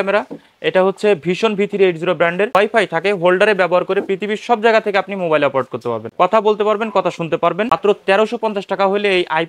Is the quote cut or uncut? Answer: cut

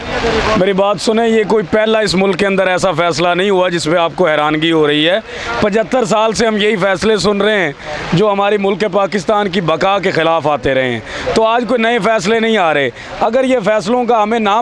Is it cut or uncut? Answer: uncut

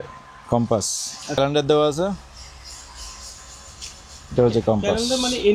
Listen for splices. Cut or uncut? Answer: cut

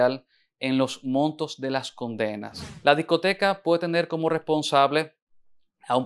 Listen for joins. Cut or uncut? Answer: cut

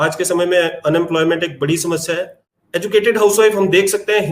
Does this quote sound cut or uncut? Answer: cut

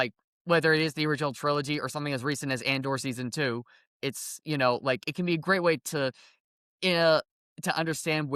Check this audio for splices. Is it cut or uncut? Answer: uncut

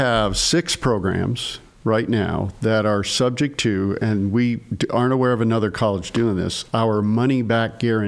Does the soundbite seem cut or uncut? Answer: uncut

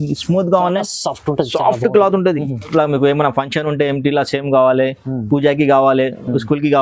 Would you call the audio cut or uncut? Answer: cut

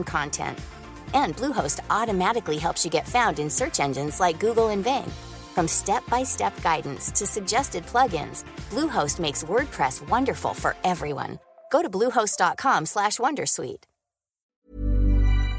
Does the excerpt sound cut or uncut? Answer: cut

